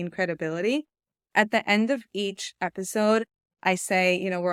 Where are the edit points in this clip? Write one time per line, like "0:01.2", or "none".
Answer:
none